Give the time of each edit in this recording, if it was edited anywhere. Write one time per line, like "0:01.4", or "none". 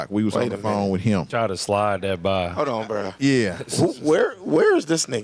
0:01.3